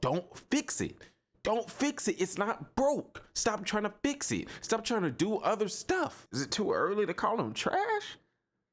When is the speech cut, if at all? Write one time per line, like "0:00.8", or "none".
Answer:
0:06.2